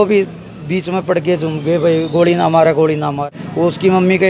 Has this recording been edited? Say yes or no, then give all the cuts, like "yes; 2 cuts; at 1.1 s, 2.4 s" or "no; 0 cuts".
yes; 1 cut; at 3.3 s